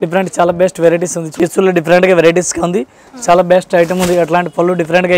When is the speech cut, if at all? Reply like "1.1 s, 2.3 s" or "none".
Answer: 1.3 s